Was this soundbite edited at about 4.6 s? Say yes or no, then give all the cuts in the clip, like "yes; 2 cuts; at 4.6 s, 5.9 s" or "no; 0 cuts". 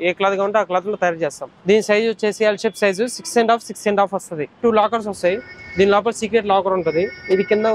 yes; 2 cuts; at 1.5 s, 4.6 s